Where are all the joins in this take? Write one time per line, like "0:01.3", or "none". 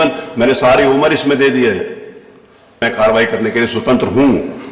0:02.8